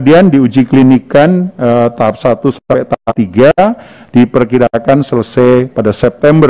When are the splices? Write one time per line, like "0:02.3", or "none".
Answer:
none